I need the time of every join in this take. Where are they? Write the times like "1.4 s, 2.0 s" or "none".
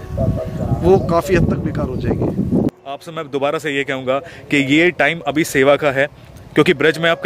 2.7 s